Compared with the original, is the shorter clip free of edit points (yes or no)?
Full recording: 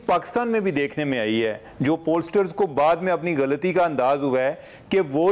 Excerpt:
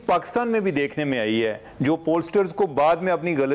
yes